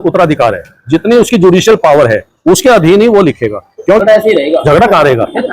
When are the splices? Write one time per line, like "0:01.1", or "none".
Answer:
0:04.0